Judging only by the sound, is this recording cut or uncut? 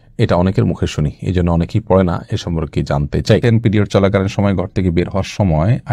cut